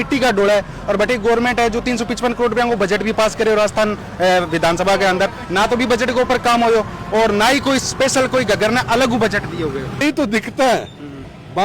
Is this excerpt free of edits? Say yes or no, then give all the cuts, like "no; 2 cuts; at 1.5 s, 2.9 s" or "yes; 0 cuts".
no; 1 cut; at 10.0 s